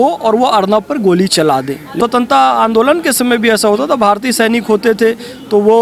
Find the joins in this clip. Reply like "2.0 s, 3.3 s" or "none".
1.9 s

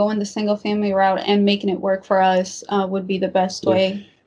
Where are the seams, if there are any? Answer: none

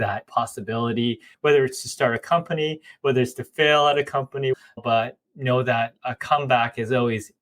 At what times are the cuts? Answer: 1.2 s, 4.6 s

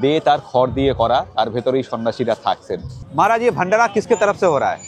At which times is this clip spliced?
3.0 s

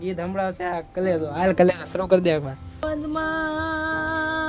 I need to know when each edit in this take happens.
2.8 s

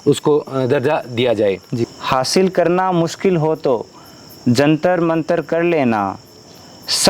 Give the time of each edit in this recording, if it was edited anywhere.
1.8 s

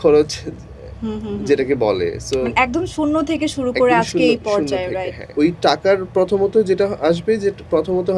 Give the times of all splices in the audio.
5.3 s

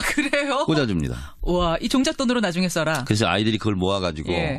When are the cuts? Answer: 3.5 s

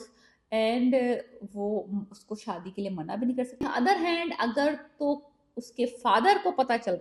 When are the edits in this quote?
3.6 s

